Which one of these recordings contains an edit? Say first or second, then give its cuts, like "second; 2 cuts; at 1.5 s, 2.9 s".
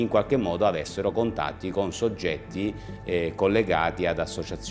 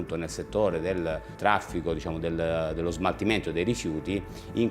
second; 1 cut; at 1.3 s